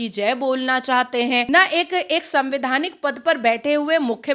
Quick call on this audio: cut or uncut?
cut